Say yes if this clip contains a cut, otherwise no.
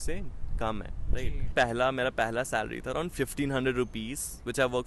yes